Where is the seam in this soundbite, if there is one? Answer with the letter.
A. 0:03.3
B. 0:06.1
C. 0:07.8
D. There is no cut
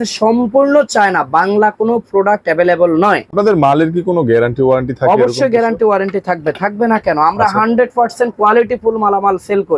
A